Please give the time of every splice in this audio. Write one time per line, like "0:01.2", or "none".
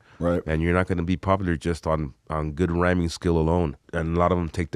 0:03.8

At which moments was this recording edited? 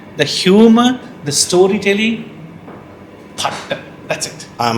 none

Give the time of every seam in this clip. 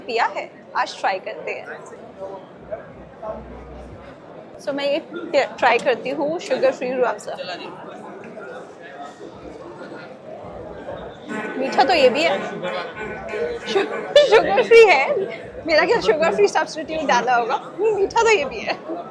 none

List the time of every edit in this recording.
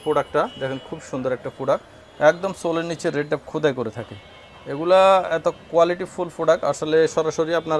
none

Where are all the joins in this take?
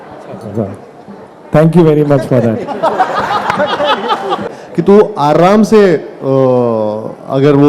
0:04.5

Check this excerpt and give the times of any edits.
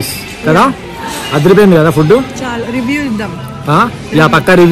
none

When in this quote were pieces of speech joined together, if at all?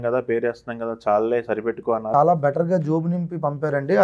0:02.1

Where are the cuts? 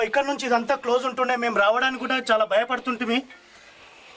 none

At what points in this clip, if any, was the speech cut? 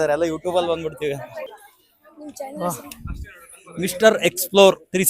0:01.5

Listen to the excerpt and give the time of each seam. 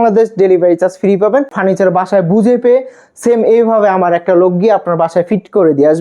0:01.6

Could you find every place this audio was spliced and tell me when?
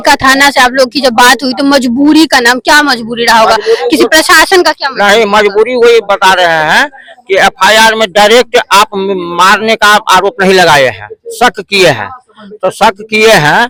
none

